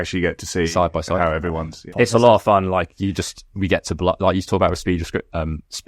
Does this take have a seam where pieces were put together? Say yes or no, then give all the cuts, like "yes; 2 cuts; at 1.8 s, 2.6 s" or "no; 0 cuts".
yes; 1 cut; at 1.8 s